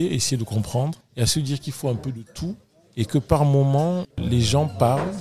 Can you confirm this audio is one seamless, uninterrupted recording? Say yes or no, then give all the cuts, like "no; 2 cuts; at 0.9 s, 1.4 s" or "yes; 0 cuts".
yes; 0 cuts